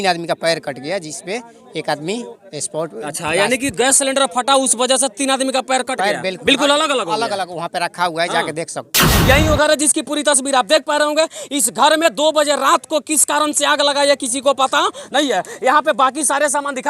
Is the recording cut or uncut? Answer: cut